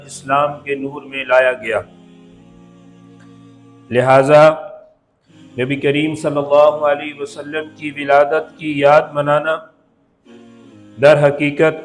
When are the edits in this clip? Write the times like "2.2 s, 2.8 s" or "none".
none